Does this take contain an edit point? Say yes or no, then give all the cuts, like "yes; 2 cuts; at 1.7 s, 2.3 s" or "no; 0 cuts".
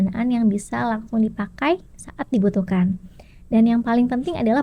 no; 0 cuts